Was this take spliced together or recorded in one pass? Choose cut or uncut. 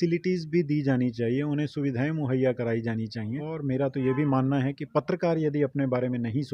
cut